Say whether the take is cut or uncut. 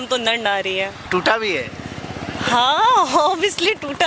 cut